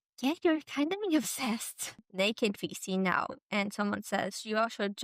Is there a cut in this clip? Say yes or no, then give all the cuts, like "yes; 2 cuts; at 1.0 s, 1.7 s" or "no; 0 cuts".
yes; 1 cut; at 2.0 s